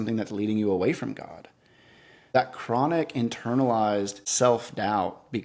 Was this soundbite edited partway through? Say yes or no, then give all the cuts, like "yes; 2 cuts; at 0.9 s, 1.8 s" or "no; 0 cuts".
yes; 2 cuts; at 2.4 s, 4.2 s